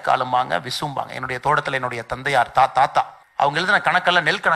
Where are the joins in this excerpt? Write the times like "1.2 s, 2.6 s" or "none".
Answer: 3.2 s